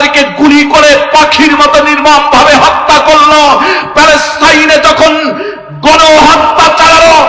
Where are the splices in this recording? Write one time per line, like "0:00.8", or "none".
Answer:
none